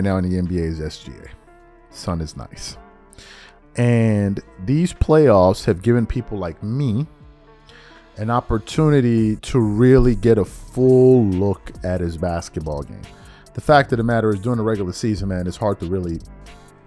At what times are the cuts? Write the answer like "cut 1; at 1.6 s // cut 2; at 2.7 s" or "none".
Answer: none